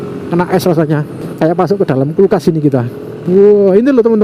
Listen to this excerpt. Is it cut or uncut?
cut